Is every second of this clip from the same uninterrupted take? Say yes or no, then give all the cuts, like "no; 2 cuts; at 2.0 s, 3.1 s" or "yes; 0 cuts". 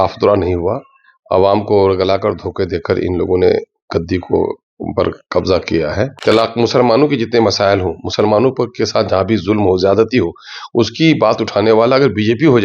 no; 1 cut; at 6.1 s